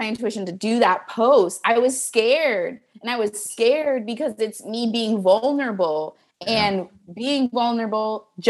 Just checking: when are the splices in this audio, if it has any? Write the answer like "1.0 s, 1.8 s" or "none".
none